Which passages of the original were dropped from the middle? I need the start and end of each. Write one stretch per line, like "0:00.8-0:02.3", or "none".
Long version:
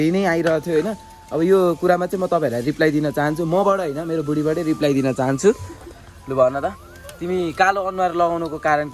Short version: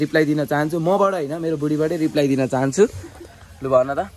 none